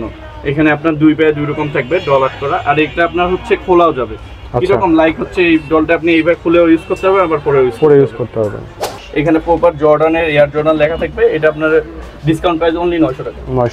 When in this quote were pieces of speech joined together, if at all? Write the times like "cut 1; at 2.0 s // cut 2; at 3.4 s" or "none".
cut 1; at 8.9 s